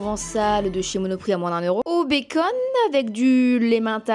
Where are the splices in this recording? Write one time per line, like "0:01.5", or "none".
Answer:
none